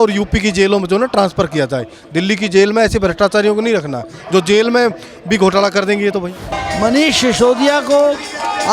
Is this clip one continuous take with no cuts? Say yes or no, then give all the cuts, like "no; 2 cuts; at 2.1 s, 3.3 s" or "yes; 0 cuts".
no; 1 cut; at 6.4 s